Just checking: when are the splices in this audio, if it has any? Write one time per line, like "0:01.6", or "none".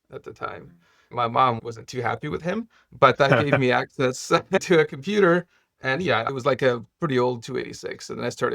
0:01.1
0:05.9